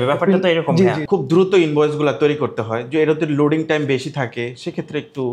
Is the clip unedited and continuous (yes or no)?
no